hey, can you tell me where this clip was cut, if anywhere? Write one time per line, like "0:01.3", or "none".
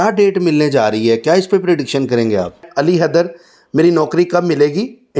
0:02.7